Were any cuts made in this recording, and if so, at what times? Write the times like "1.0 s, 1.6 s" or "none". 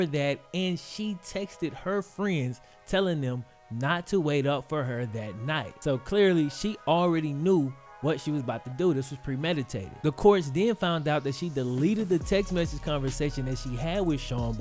none